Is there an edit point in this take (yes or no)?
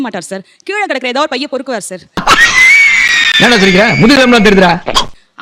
no